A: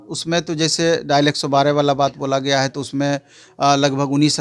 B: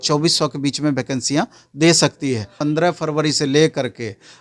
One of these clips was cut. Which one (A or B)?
B